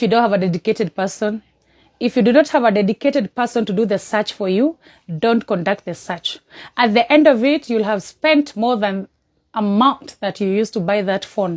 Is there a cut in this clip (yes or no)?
no